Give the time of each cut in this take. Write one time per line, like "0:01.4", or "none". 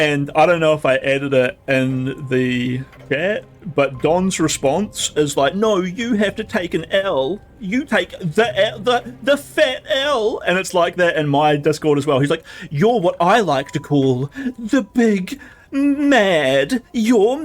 0:02.9